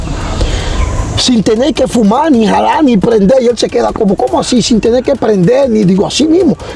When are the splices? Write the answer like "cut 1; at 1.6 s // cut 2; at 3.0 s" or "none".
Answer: none